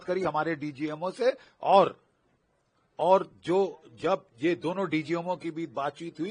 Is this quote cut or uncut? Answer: uncut